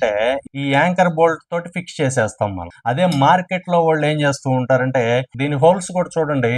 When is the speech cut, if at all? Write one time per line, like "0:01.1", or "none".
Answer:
0:02.7
0:05.3